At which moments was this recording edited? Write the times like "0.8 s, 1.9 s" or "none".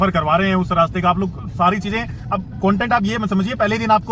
none